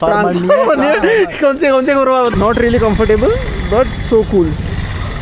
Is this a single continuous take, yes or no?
no